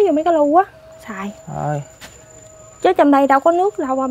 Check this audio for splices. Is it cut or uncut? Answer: uncut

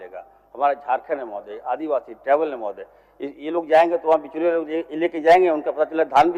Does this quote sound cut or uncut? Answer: uncut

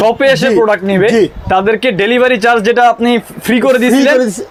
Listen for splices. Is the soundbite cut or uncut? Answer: uncut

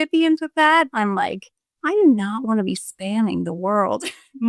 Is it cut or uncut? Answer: uncut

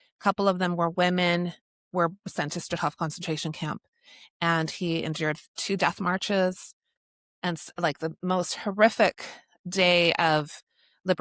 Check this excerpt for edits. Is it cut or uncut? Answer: uncut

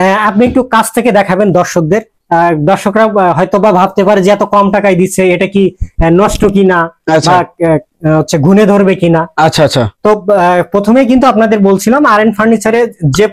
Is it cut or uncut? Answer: uncut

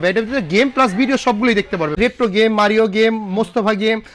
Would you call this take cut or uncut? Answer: cut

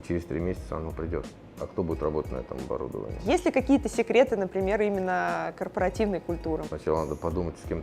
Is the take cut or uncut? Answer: cut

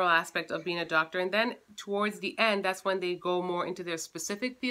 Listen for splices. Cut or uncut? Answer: uncut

